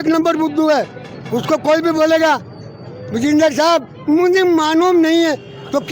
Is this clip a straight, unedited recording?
yes; 0 cuts

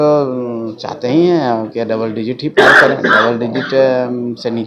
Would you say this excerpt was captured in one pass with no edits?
yes; 0 cuts

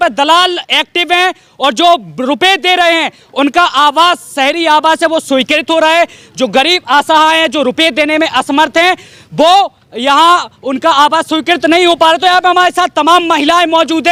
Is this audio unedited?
yes; 0 cuts

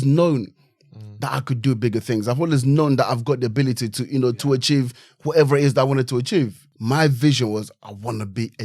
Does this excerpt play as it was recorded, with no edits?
no; 1 cut; at 6.6 s

